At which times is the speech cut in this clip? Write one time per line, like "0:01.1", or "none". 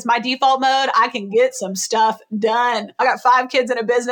0:03.0